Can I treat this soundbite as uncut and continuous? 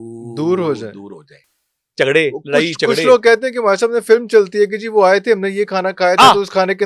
yes; 0 cuts

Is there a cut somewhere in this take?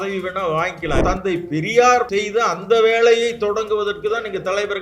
yes; 2 cuts; at 1.0 s, 2.1 s

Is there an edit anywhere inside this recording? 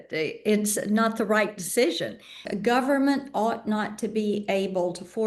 yes; 1 cut; at 2.5 s

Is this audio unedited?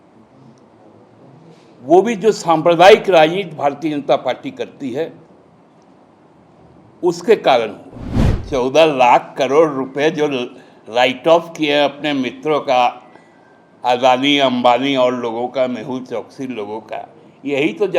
no; 1 cut; at 8.3 s

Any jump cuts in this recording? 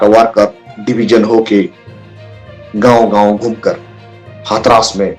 no; 0 cuts

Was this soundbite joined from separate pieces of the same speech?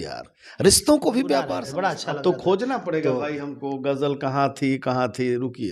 yes; 1 cut; at 1.6 s

